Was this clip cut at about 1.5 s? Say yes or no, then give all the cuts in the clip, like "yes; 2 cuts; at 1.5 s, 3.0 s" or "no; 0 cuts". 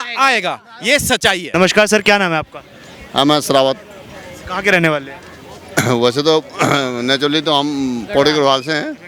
no; 0 cuts